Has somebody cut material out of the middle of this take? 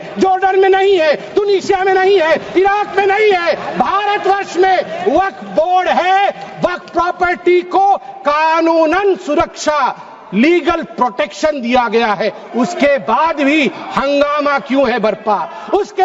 no; 0 cuts

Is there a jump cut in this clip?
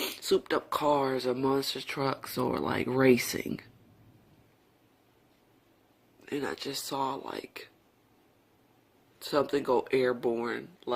yes; 1 cut; at 5.9 s

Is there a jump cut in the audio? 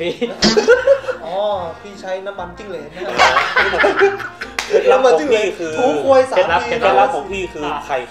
yes; 1 cut; at 1.2 s

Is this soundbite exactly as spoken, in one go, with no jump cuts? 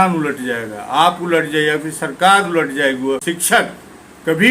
no; 1 cut; at 3.2 s

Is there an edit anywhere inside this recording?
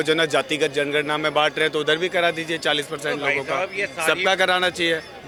no; 0 cuts

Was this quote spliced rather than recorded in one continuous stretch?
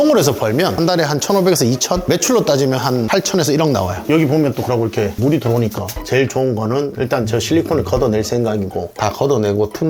yes; 2 cuts; at 4.0 s, 5.9 s

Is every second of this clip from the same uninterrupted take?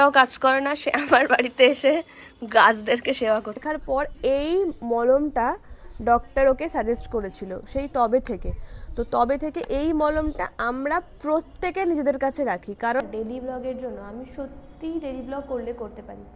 no; 2 cuts; at 3.6 s, 13.0 s

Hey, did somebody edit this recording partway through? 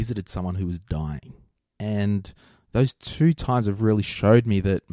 no; 0 cuts

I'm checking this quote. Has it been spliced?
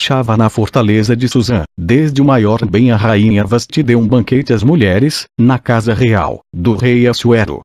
no; 0 cuts

